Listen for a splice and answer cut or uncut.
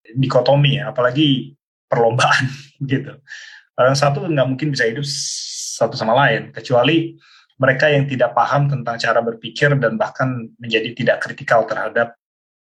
uncut